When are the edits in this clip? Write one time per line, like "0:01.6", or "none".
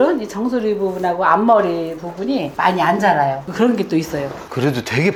none